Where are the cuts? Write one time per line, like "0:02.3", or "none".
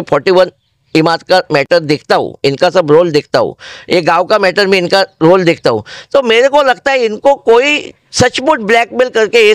none